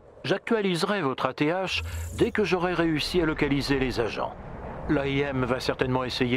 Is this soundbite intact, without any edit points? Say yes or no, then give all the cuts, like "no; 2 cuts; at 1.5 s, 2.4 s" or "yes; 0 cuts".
yes; 0 cuts